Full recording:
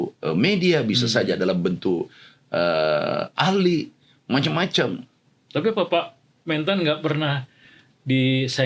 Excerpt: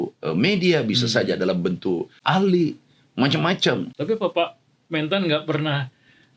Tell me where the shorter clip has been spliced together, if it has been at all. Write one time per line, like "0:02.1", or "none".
0:02.2
0:03.9